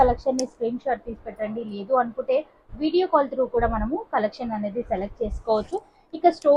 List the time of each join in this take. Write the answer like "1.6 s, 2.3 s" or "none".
none